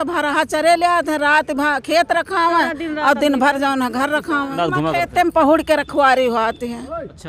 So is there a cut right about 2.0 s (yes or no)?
no